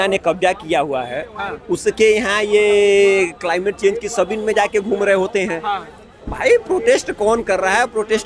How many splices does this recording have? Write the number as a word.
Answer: zero